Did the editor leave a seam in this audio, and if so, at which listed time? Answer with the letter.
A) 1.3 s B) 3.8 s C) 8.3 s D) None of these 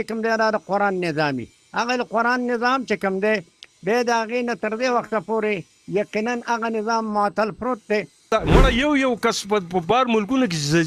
C